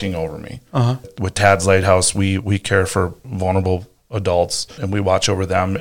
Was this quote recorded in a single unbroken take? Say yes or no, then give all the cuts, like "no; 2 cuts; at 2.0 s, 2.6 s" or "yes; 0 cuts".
no; 3 cuts; at 1.1 s, 3.3 s, 4.8 s